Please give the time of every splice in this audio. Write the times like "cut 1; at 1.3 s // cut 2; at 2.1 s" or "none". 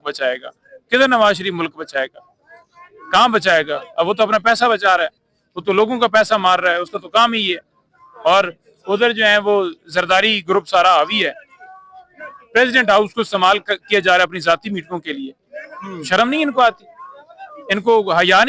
none

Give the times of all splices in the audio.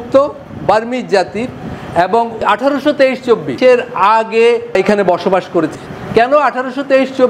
cut 1; at 2.4 s // cut 2; at 3.5 s // cut 3; at 4.7 s // cut 4; at 5.8 s

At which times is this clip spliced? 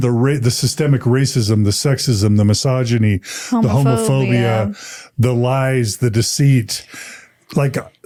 none

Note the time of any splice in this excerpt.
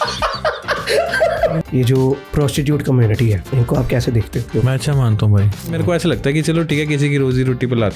cut 1; at 1.6 s // cut 2; at 2.3 s // cut 3; at 3.4 s // cut 4; at 4.5 s // cut 5; at 5.7 s

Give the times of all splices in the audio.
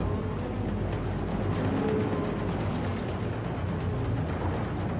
cut 1; at 3.6 s

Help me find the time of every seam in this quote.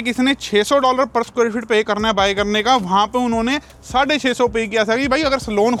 none

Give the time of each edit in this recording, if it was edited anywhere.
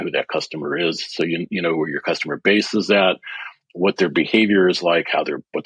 none

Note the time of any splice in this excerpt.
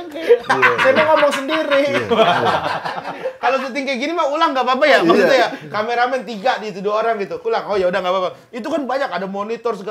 cut 1; at 3.2 s

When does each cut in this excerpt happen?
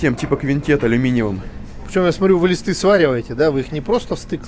none

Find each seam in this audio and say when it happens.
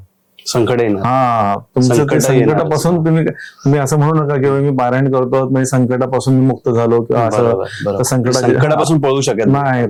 none

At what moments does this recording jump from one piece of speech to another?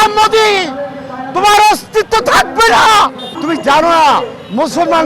cut 1; at 3.3 s

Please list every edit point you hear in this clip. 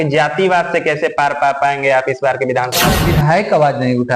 cut 1; at 2.9 s

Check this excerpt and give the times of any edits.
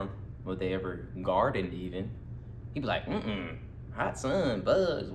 none

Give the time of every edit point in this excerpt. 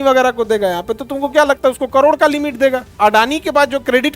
cut 1; at 2.9 s

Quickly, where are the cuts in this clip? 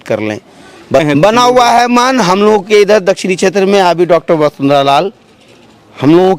cut 1; at 1.0 s

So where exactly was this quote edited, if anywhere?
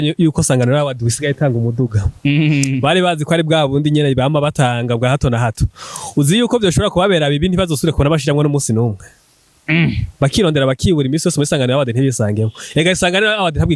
none

